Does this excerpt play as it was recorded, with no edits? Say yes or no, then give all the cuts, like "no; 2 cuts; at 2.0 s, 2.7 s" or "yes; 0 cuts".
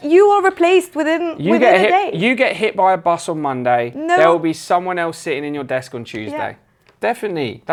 yes; 0 cuts